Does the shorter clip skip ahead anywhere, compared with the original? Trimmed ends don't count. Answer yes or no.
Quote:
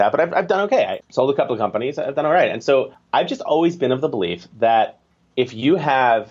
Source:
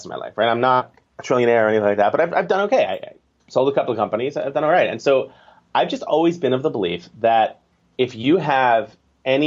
yes